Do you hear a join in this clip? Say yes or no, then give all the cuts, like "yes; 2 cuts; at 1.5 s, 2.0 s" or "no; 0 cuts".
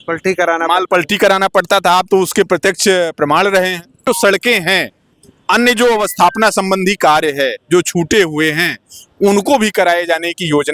yes; 1 cut; at 4.0 s